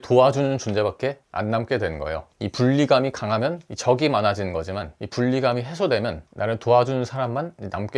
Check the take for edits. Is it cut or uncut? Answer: cut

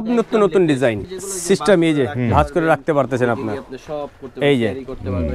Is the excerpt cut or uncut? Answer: cut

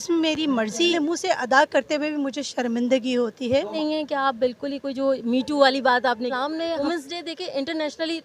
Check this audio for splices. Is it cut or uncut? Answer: cut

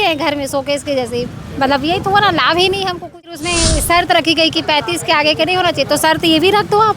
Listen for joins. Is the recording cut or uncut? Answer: cut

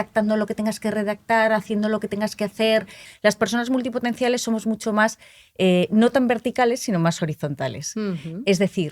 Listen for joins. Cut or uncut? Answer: cut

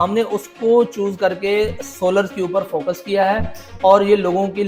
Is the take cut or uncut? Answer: uncut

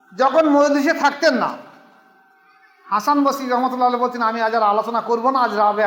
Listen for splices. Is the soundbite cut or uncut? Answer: uncut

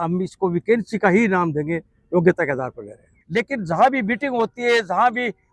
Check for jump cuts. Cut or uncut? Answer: cut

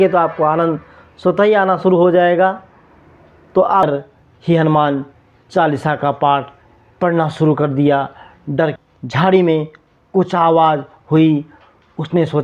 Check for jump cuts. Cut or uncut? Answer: cut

